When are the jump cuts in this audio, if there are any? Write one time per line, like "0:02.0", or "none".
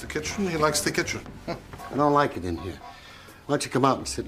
none